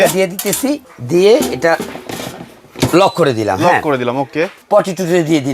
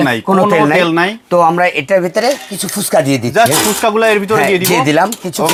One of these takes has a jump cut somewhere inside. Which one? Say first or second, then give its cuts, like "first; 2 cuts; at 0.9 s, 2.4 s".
first; 2 cuts; at 0.9 s, 4.5 s